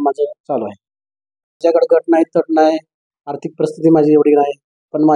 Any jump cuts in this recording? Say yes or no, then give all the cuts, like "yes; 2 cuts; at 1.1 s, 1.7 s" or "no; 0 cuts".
yes; 1 cut; at 1.6 s